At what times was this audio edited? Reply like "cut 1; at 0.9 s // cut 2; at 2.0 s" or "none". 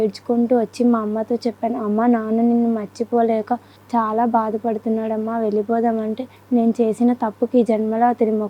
cut 1; at 3.7 s // cut 2; at 6.3 s